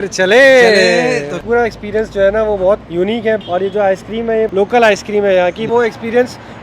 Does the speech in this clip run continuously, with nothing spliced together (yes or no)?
no